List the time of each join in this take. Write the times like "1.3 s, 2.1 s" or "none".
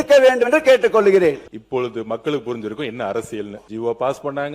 1.5 s, 3.6 s